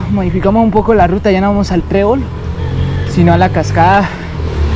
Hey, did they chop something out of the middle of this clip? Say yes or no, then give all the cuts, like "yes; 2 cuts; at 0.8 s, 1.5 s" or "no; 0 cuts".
no; 0 cuts